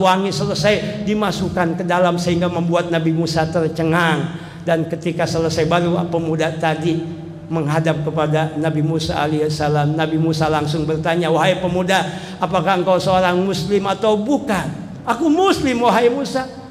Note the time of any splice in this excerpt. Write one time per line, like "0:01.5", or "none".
none